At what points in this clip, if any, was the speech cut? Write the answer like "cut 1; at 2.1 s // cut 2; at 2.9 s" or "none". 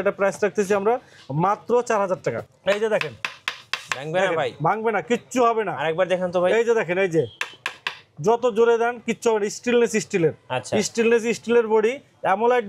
cut 1; at 2.5 s